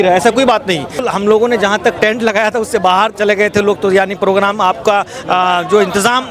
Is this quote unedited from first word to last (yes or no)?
no